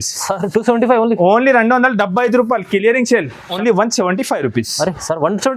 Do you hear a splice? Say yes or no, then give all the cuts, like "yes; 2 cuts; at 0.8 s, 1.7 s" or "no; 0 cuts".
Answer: yes; 1 cut; at 3.5 s